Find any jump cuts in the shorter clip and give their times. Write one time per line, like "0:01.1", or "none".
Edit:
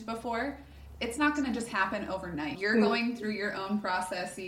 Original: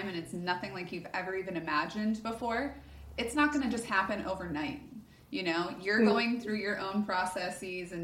0:02.6

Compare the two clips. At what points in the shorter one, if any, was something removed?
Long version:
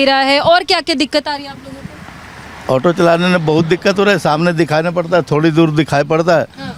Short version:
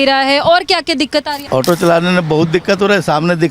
0:01.4

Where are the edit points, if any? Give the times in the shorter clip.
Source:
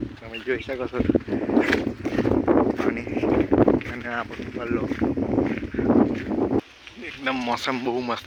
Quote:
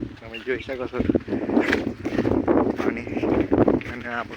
none

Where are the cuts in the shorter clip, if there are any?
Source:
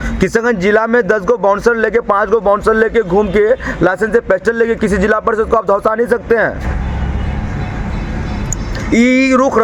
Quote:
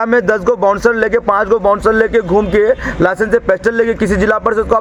none

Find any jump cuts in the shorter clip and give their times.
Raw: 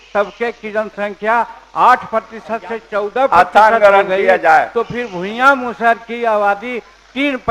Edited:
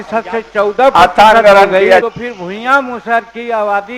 0:02.0

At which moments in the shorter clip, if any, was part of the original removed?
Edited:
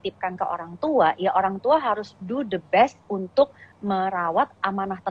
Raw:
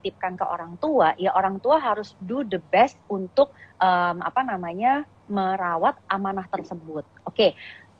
0:03.6

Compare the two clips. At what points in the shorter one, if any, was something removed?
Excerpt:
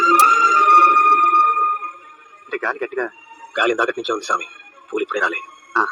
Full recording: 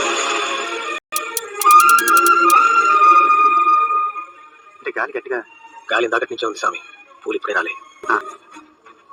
none

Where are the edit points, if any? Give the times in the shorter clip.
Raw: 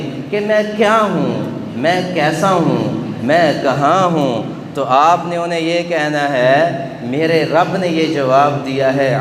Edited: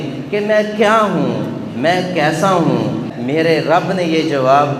0:03.1

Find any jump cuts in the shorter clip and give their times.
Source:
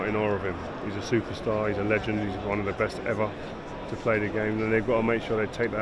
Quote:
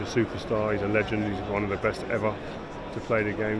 none

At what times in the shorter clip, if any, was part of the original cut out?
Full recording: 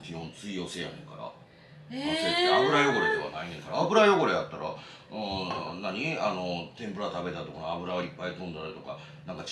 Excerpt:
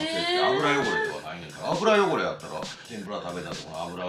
0:02.8

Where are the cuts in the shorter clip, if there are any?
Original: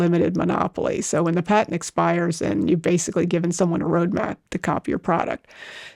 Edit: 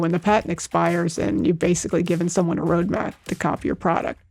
none

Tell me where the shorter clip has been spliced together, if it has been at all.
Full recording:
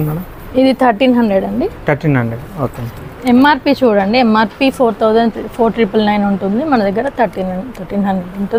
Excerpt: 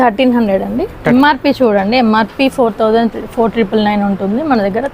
0:01.0

